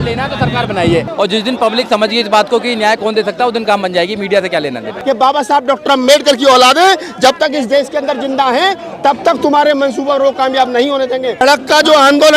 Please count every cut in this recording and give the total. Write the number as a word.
three